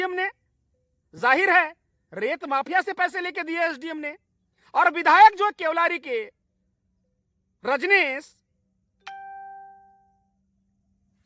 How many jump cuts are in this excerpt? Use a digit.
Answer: 0